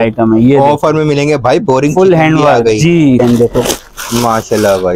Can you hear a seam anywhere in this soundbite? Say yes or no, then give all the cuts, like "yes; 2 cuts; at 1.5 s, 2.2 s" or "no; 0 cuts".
yes; 1 cut; at 3.2 s